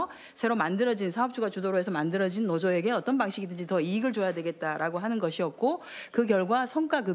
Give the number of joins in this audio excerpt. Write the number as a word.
one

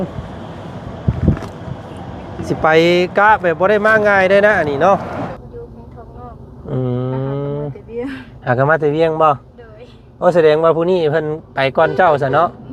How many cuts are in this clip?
one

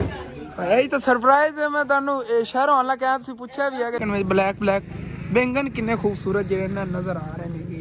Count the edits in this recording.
one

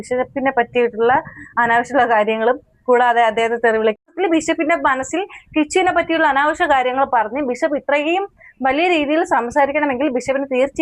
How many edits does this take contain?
one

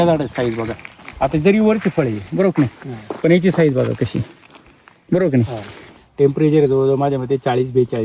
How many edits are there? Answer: one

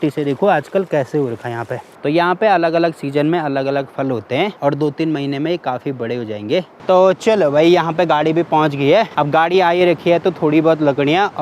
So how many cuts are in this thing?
three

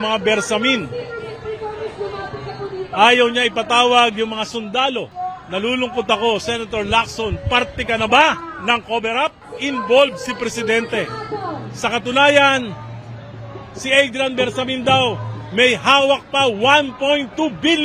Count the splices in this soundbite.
two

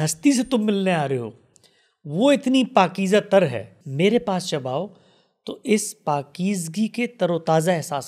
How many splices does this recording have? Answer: one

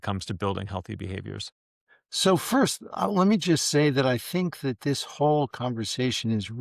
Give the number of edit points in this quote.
one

